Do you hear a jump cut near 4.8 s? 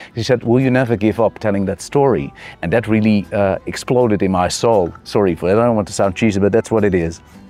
no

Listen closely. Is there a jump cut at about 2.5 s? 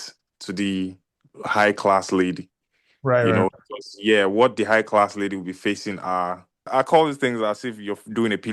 no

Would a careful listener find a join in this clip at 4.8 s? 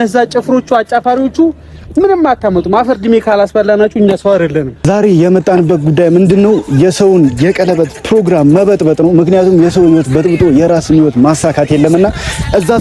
yes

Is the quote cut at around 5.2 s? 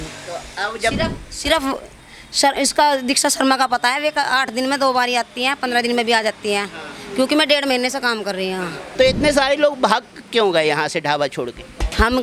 no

